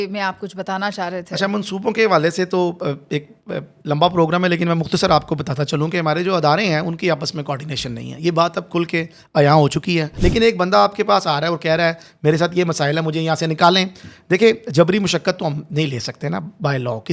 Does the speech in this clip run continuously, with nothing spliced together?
no; 1 cut; at 10.1 s

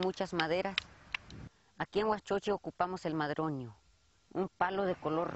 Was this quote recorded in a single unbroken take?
yes; 0 cuts

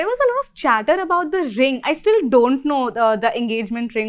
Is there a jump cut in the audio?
no; 0 cuts

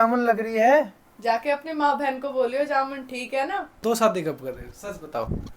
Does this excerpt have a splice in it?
yes; 1 cut; at 3.7 s

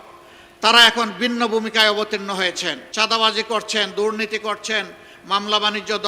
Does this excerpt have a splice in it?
yes; 1 cut; at 2.8 s

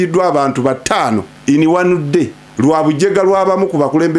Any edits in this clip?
yes; 2 cuts; at 1.3 s, 2.4 s

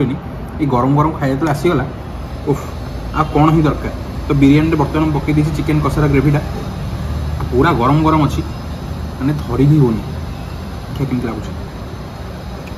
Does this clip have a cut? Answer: no; 0 cuts

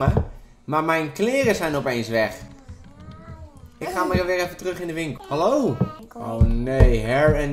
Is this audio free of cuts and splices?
no; 2 cuts; at 5.2 s, 6.1 s

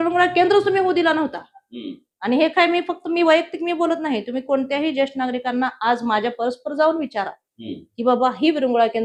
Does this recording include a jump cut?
no; 0 cuts

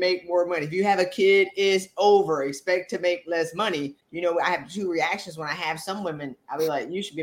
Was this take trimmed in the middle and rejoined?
yes; 1 cut; at 4.0 s

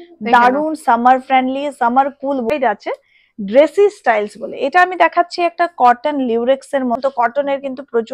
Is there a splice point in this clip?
yes; 2 cuts; at 2.5 s, 7.0 s

